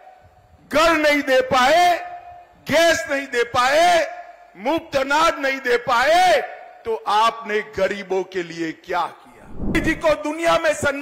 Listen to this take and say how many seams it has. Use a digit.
1